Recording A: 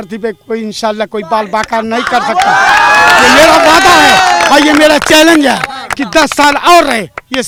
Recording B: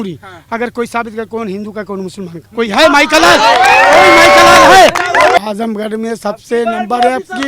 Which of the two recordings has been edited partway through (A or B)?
B